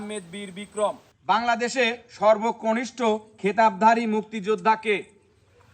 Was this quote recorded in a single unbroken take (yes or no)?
no